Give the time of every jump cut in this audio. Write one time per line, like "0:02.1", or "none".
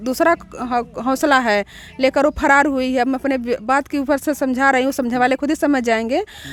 none